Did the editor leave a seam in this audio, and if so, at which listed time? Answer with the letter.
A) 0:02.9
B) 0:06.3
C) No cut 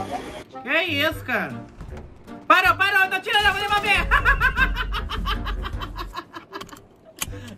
C